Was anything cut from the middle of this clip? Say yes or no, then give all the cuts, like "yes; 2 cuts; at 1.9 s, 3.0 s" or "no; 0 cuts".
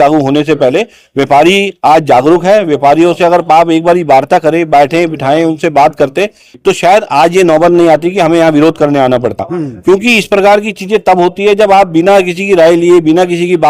no; 0 cuts